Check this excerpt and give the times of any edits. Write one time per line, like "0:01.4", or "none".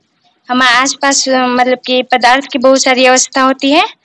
none